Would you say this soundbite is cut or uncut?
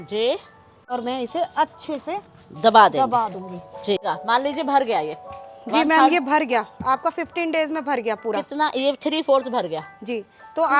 cut